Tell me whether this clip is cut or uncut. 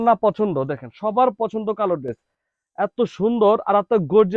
uncut